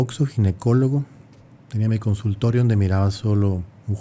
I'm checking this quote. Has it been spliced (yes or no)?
no